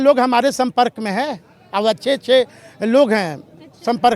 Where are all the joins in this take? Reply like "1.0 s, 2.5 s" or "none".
none